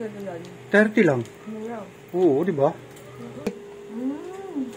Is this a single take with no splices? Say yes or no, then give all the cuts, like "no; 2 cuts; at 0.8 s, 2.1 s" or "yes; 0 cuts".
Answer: no; 1 cut; at 3.5 s